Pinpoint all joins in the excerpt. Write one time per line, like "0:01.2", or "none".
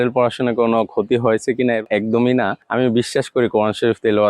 0:01.9
0:02.6